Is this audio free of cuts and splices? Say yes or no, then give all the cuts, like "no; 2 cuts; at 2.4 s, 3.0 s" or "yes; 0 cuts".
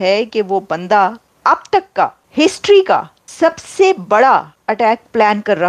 no; 4 cuts; at 1.3 s, 2.2 s, 3.2 s, 4.6 s